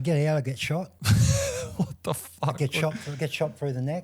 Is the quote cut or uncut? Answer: cut